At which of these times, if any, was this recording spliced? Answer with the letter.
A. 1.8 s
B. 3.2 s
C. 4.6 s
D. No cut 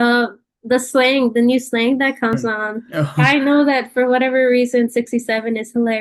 B